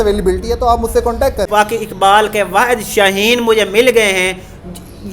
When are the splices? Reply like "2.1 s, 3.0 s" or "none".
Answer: 1.5 s